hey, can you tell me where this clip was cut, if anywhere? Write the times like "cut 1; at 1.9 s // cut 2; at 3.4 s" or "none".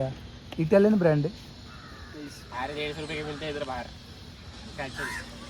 none